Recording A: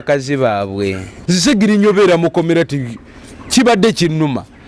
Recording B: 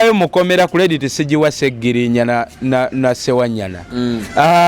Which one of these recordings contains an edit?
A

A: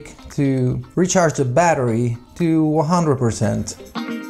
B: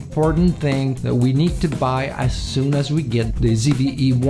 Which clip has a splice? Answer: B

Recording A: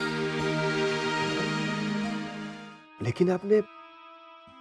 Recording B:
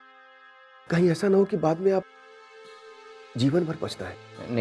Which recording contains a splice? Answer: A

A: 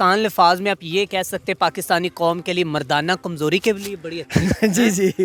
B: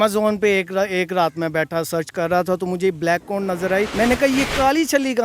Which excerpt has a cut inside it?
B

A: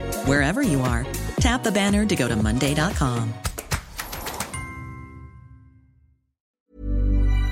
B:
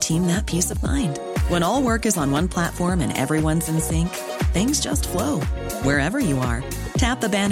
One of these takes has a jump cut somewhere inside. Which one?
A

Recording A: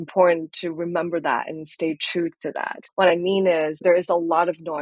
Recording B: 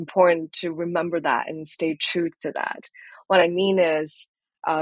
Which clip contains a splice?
A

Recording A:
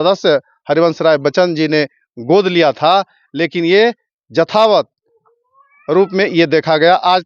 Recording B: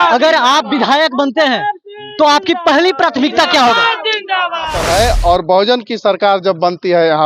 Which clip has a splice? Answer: B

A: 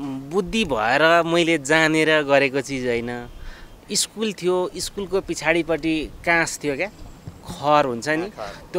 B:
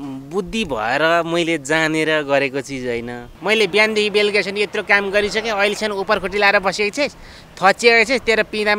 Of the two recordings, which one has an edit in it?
B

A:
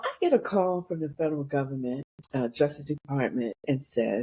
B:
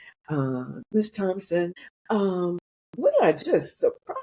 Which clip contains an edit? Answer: B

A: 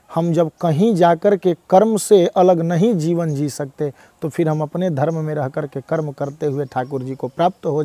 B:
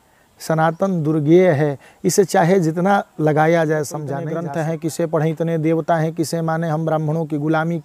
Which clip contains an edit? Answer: B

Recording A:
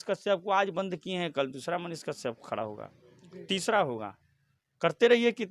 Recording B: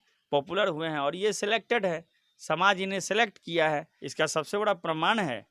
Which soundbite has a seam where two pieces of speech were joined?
B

